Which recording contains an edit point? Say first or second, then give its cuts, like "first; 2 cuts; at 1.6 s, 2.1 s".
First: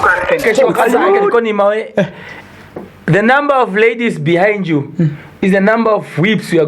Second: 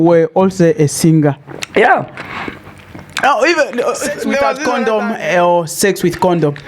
second; 1 cut; at 4.5 s